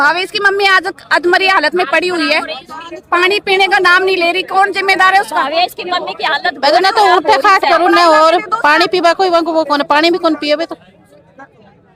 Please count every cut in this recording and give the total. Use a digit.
0